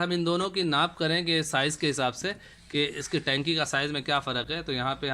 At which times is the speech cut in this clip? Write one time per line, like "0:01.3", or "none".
none